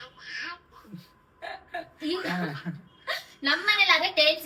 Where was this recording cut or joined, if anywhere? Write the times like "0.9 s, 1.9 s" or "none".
none